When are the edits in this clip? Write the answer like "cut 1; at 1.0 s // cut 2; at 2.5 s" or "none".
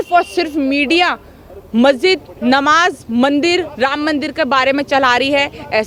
none